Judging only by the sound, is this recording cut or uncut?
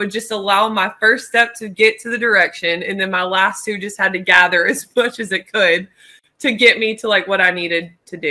uncut